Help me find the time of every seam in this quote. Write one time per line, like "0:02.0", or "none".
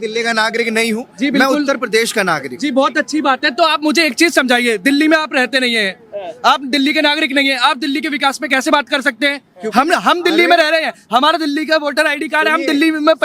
none